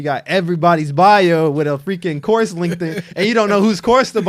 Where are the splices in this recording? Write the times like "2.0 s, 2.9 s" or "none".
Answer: none